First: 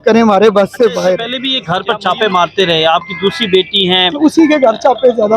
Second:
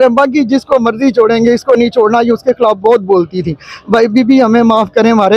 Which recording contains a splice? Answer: first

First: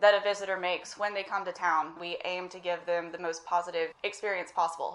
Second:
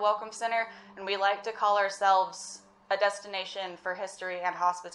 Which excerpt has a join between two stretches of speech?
first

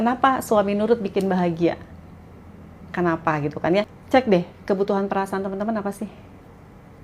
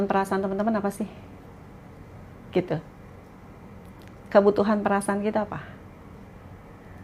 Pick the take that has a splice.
first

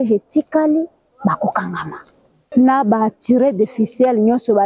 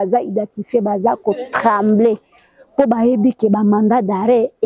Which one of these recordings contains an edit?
first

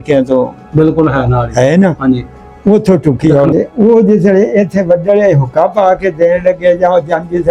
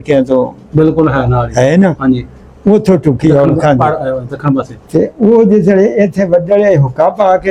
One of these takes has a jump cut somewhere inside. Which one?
first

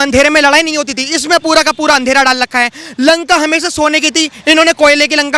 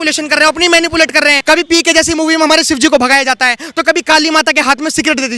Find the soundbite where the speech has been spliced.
second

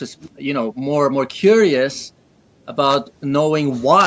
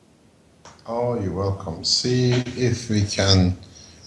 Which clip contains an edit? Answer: first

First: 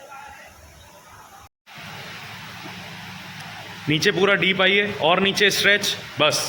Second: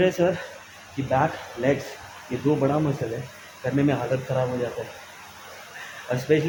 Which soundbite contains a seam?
first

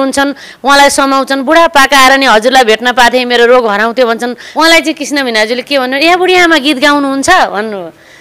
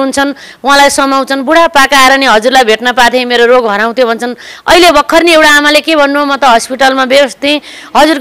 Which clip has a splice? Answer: first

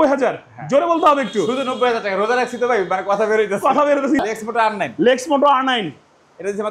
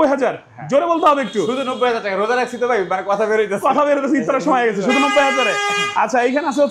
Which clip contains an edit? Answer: first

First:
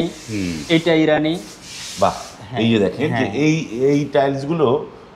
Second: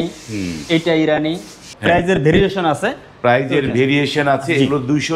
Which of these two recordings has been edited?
second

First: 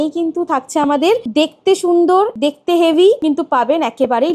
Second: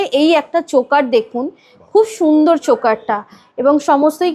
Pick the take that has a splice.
first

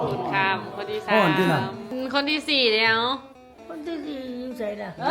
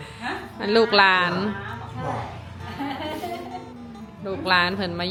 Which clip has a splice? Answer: first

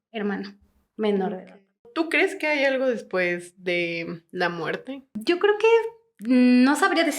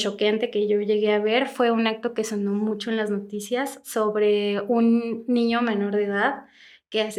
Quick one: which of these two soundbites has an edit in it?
first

